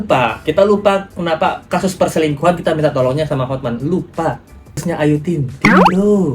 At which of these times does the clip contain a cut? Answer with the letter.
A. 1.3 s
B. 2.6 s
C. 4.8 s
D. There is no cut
C